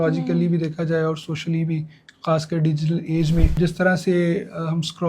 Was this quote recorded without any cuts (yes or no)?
no